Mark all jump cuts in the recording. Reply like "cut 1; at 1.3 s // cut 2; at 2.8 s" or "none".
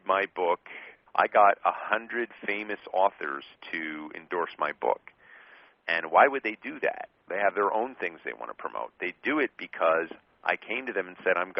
cut 1; at 0.9 s